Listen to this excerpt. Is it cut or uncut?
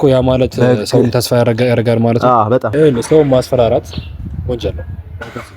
cut